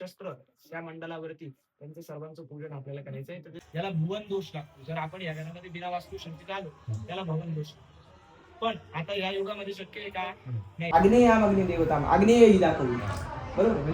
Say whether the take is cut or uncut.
cut